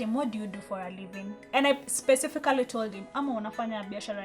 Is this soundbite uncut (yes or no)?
no